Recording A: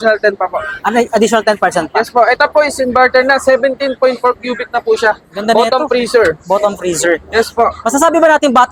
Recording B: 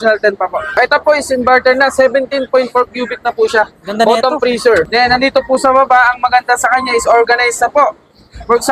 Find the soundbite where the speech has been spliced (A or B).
B